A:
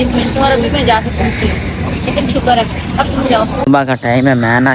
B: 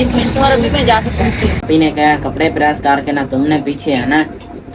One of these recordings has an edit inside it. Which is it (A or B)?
B